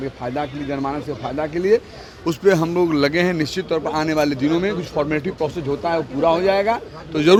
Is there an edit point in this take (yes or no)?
no